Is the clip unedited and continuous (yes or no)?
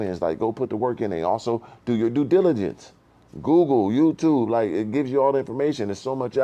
yes